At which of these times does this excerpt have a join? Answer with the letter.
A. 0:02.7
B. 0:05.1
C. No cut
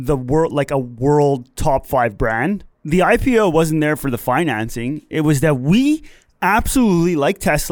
A